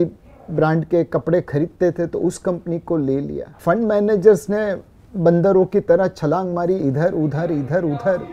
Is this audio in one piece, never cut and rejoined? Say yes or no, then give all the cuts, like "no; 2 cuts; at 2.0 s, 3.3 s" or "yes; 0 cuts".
yes; 0 cuts